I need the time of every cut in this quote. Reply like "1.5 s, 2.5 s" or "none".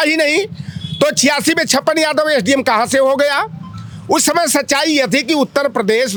none